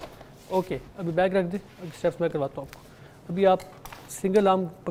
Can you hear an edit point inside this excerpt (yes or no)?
no